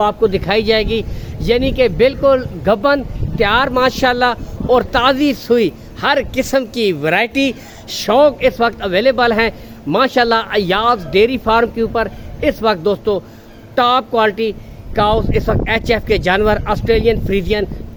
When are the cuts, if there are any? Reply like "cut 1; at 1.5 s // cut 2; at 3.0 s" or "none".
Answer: none